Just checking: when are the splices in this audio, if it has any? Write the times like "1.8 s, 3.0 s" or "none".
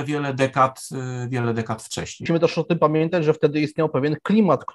2.2 s